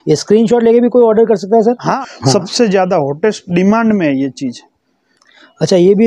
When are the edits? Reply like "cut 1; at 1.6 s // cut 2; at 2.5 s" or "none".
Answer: cut 1; at 2.0 s

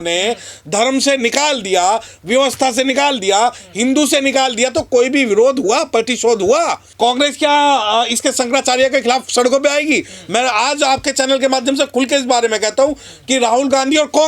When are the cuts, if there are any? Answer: cut 1; at 6.9 s

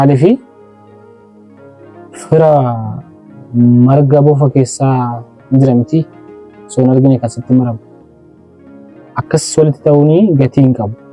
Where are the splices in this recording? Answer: none

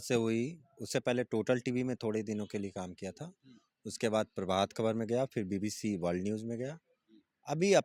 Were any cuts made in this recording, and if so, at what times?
none

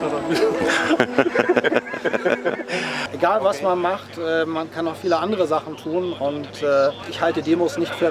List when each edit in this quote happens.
cut 1; at 3.0 s // cut 2; at 7.1 s

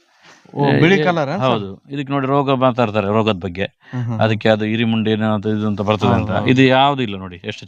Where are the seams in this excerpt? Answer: none

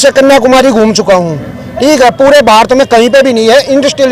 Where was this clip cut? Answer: none

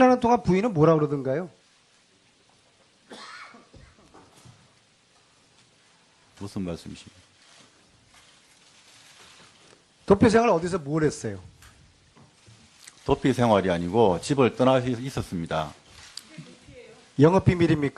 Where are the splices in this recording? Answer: cut 1; at 9.0 s

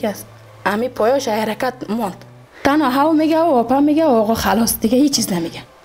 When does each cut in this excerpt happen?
cut 1; at 2.4 s

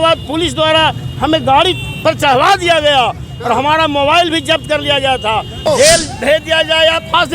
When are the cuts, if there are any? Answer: cut 1; at 5.7 s

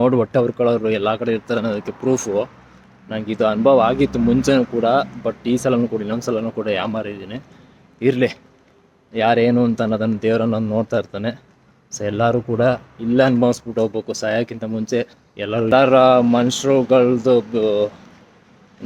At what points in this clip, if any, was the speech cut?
cut 1; at 15.7 s

